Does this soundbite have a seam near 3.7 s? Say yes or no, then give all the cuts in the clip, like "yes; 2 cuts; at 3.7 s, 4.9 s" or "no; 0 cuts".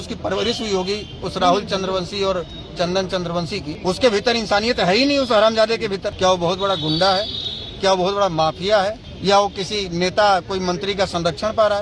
yes; 3 cuts; at 3.7 s, 6.1 s, 9.1 s